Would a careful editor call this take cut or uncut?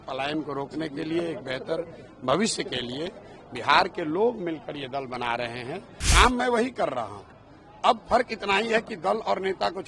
cut